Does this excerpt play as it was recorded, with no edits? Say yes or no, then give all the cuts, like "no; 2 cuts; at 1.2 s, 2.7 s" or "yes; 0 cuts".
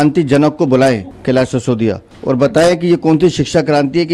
no; 2 cuts; at 1.1 s, 2.1 s